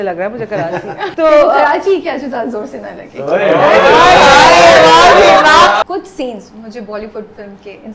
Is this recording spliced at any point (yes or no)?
yes